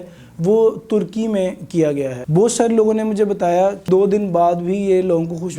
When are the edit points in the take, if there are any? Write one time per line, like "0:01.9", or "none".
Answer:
0:02.2
0:03.9